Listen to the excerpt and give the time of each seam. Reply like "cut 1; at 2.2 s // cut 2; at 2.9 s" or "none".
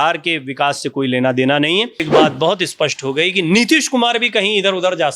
cut 1; at 2.0 s